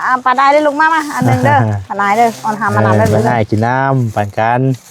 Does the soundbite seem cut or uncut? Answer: uncut